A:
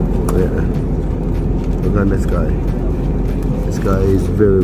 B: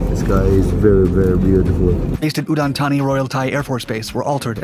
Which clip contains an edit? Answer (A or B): B